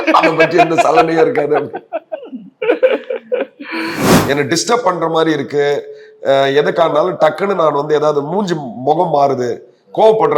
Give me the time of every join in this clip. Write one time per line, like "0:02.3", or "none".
0:04.2